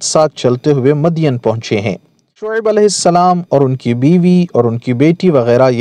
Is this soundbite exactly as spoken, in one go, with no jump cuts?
no; 1 cut; at 2.6 s

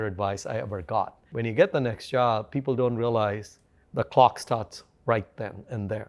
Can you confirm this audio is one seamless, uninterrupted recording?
no; 1 cut; at 1.3 s

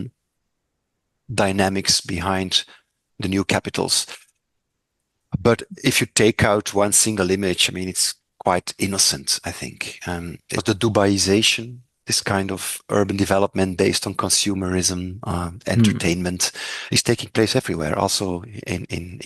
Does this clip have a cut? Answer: yes; 1 cut; at 10.6 s

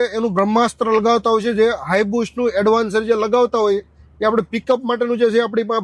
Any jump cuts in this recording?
no; 0 cuts

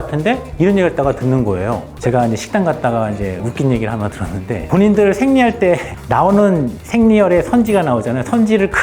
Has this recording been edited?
yes; 1 cut; at 1.9 s

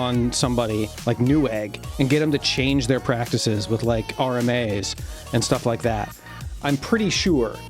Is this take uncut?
no; 1 cut; at 6.4 s

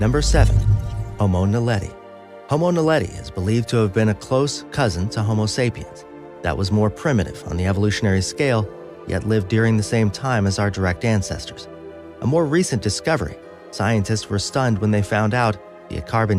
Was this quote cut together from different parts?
yes; 1 cut; at 9.1 s

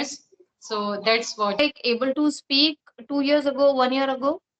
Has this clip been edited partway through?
yes; 1 cut; at 1.6 s

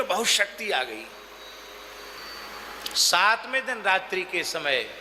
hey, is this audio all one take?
no; 1 cut; at 2.2 s

